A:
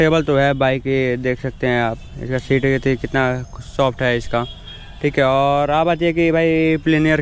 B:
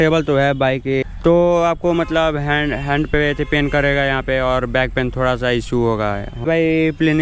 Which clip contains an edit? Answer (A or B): B